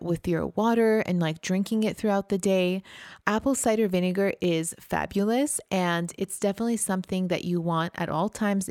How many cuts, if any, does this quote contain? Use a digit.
0